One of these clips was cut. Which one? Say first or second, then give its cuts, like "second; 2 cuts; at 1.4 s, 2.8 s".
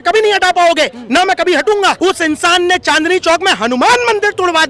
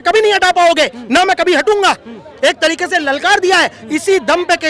first; 1 cut; at 2.0 s